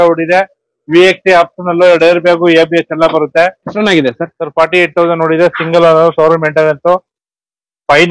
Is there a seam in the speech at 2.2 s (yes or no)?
no